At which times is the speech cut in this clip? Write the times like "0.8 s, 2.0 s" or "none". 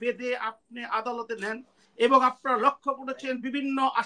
none